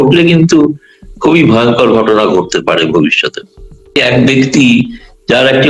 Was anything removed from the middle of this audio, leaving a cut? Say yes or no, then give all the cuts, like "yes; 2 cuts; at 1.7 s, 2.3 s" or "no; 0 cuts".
yes; 1 cut; at 4.0 s